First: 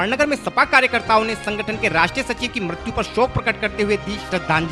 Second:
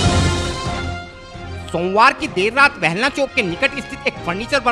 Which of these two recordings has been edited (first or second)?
second